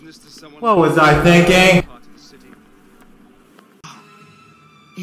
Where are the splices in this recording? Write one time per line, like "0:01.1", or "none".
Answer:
0:03.8